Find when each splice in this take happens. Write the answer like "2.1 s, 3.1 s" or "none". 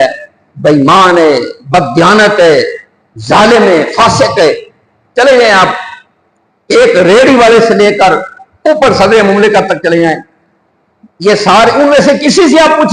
none